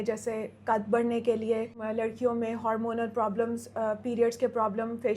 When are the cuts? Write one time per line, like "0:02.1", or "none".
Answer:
0:01.8